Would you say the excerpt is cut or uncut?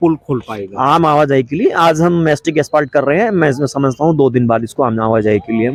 uncut